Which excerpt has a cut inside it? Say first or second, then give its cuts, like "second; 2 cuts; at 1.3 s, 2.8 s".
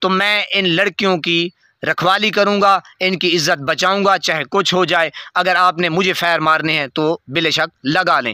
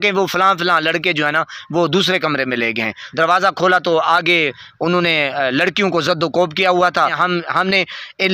second; 2 cuts; at 3.0 s, 7.2 s